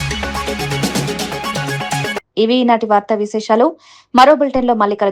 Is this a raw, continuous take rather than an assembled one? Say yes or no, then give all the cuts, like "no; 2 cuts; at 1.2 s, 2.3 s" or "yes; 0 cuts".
yes; 0 cuts